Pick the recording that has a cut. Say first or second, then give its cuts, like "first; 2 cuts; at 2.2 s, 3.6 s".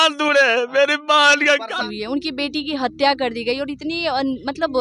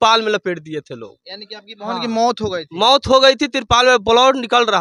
first; 1 cut; at 1.8 s